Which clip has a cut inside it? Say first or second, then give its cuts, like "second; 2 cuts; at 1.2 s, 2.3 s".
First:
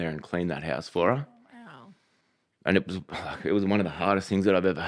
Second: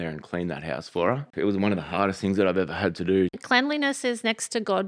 second; 2 cuts; at 1.3 s, 3.4 s